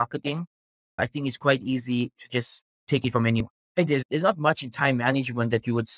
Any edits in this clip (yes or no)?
yes